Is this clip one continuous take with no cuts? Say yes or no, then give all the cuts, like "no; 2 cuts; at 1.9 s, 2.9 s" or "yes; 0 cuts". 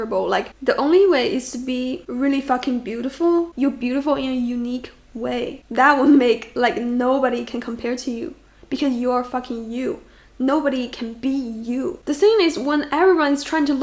yes; 0 cuts